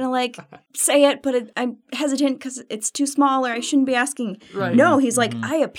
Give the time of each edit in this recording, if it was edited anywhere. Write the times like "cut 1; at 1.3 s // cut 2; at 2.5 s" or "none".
none

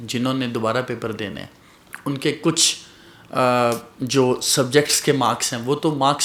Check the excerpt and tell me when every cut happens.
none

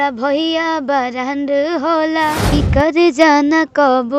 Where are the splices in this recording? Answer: cut 1; at 2.4 s

